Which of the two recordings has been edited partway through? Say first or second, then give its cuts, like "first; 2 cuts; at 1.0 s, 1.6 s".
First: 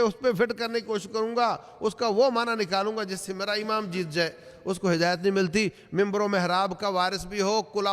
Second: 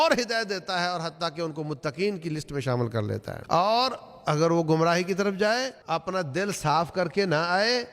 second; 2 cuts; at 3.3 s, 5.8 s